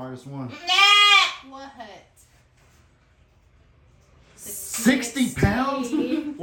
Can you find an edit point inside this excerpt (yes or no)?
no